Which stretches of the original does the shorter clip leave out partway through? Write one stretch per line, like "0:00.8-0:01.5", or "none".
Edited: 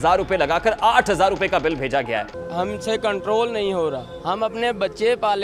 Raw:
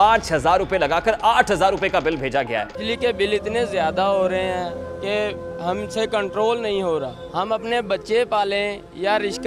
0:02.7-0:05.4